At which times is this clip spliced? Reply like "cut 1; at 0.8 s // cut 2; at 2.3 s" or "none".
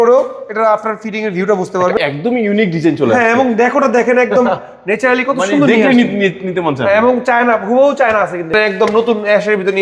cut 1; at 2.0 s // cut 2; at 8.5 s